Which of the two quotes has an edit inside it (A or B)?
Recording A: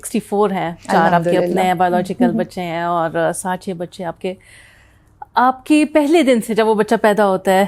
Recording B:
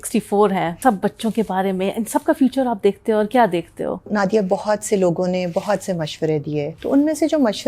B